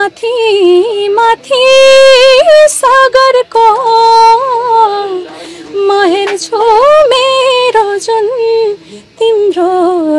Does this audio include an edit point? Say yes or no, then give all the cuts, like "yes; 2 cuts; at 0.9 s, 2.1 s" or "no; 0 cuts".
no; 0 cuts